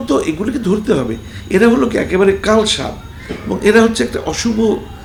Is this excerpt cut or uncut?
uncut